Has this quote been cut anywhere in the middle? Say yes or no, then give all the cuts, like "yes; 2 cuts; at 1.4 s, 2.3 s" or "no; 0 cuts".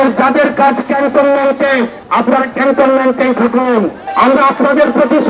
yes; 2 cuts; at 2.0 s, 4.0 s